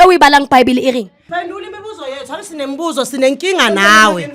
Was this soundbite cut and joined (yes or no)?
yes